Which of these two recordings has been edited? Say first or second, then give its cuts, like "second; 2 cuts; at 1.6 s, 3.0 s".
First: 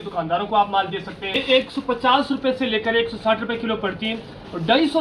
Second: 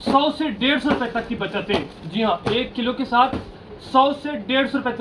first; 1 cut; at 1.3 s